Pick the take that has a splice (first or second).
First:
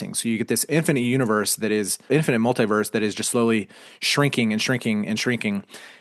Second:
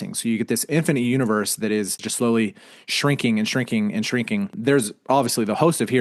second